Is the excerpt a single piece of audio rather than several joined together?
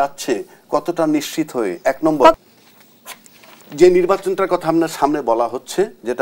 no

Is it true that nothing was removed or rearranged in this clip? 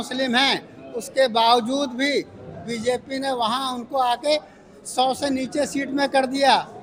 yes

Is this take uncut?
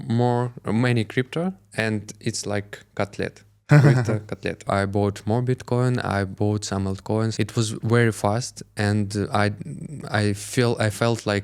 no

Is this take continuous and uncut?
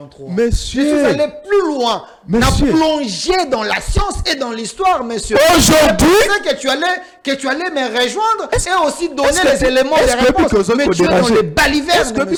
yes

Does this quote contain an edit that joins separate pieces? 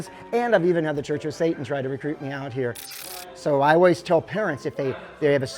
yes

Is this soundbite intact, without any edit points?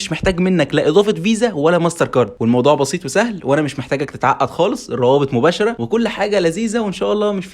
no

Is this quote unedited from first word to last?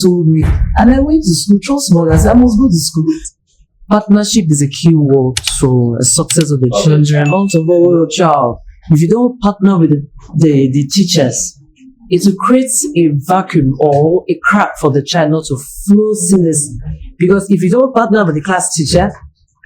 no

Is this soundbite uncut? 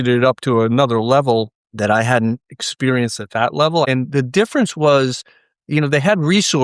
no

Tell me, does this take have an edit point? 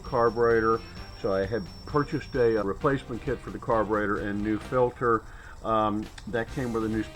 yes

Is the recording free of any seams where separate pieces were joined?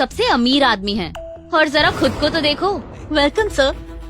no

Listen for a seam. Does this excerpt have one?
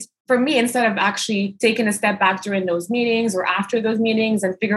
yes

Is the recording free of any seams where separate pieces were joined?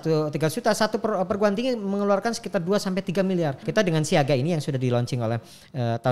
no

